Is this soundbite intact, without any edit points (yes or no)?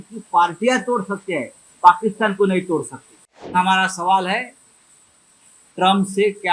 no